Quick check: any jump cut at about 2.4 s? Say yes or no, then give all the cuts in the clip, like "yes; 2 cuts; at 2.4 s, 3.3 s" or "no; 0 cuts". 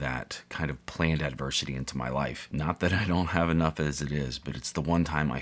yes; 1 cut; at 2.4 s